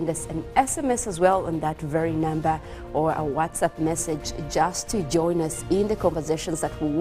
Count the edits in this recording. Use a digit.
1